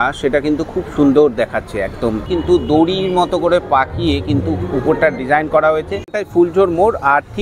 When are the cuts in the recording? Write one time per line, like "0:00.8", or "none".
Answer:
0:02.3
0:06.2